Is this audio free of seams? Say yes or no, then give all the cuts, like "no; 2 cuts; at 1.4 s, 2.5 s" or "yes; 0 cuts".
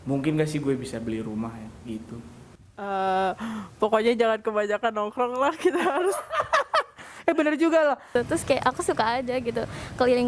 no; 2 cuts; at 2.5 s, 8.1 s